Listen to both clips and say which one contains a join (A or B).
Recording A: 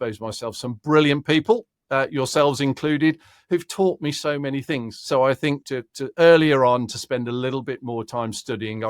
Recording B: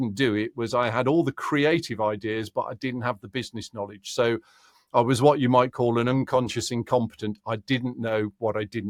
A